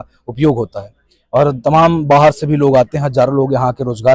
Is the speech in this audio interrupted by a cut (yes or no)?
no